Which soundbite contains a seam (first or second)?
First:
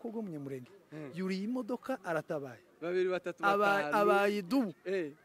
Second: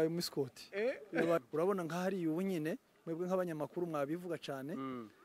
second